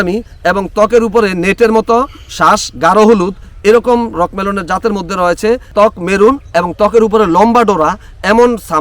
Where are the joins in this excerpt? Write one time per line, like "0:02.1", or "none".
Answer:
0:05.7